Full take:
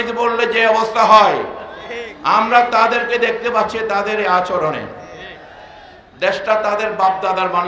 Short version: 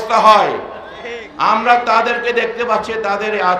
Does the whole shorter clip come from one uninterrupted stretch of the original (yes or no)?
yes